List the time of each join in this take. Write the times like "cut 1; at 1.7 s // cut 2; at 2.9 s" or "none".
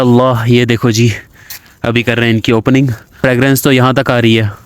cut 1; at 3.2 s

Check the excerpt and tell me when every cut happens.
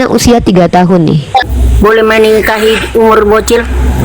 cut 1; at 1.6 s

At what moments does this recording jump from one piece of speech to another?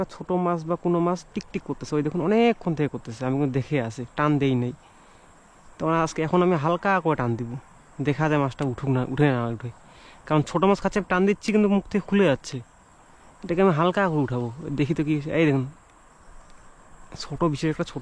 none

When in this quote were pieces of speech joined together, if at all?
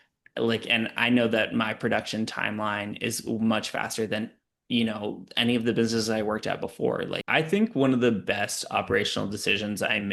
cut 1; at 7.2 s

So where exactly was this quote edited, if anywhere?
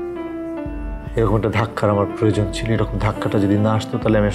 none

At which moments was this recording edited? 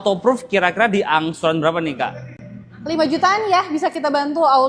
none

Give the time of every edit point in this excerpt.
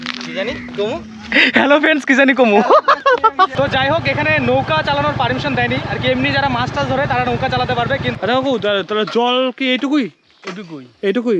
cut 1; at 3.5 s // cut 2; at 8.2 s

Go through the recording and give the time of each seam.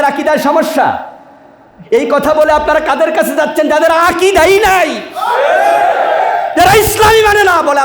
none

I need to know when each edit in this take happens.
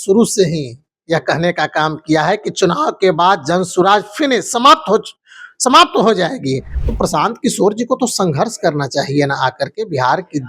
cut 1; at 6.7 s

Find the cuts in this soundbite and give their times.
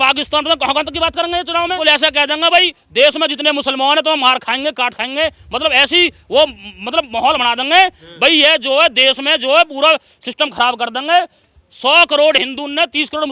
cut 1; at 1.8 s

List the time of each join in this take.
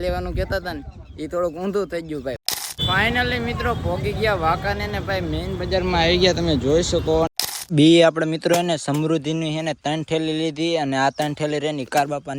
cut 1; at 2.4 s // cut 2; at 7.7 s

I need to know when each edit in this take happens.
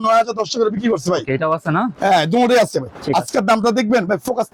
none

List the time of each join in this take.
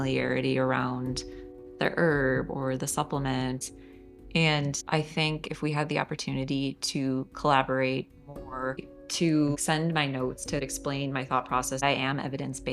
cut 1; at 3.6 s // cut 2; at 4.8 s // cut 3; at 8.9 s // cut 4; at 10.6 s // cut 5; at 11.8 s

